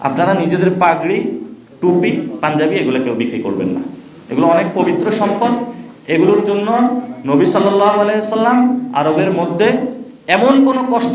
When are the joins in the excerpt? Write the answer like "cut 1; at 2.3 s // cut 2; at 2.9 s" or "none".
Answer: none